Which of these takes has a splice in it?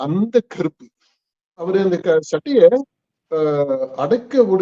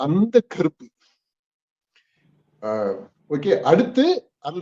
first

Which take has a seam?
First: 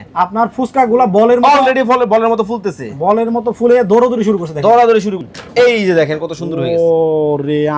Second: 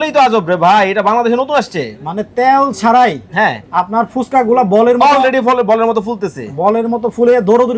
first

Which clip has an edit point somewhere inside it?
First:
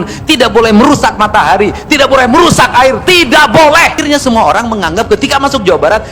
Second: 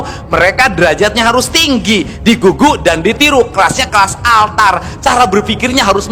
first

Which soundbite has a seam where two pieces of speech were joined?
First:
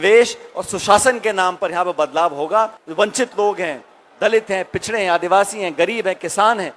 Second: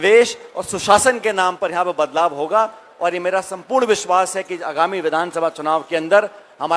first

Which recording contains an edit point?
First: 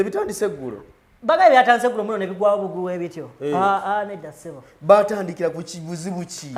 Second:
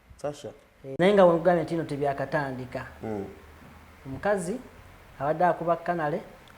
second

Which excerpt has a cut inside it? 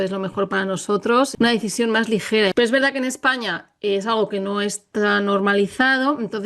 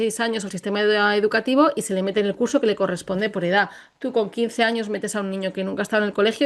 first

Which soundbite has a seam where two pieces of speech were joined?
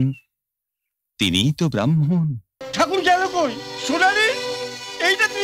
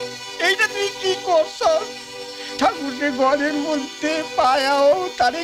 first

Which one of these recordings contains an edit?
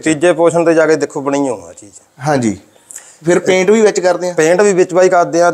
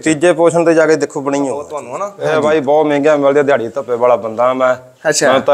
second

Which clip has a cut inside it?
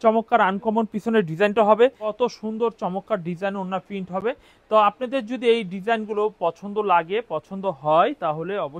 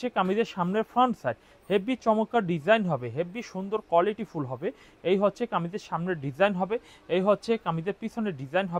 first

